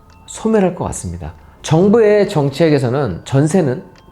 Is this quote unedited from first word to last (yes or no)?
no